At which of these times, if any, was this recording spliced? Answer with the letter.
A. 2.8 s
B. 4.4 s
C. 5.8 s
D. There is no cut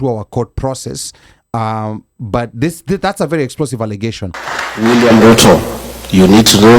B